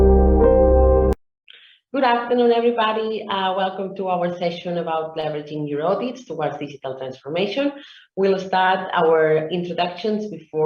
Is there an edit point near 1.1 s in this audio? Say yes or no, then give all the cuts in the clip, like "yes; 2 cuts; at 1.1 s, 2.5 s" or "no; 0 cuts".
yes; 1 cut; at 1.1 s